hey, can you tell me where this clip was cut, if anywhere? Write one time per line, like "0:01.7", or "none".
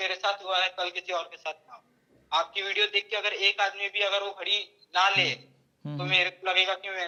none

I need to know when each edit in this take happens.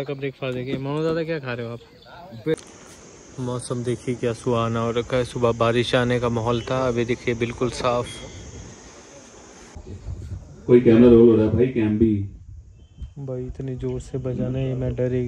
0:02.5
0:09.7

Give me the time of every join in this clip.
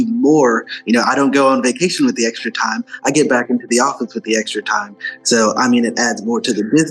none

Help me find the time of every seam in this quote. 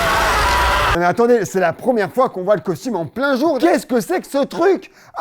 0:00.9
0:03.6

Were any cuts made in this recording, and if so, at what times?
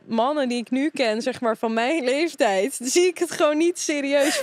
none

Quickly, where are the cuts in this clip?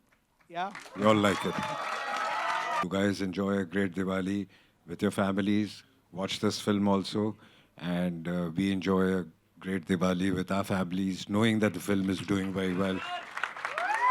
0:02.8

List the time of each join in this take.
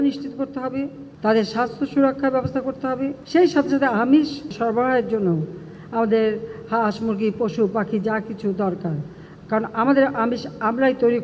0:01.0
0:03.2
0:04.5

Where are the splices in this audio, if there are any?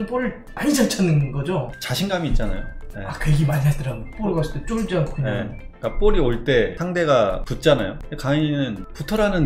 0:01.8
0:06.8
0:07.5

